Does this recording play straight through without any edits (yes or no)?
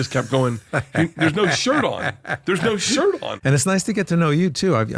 no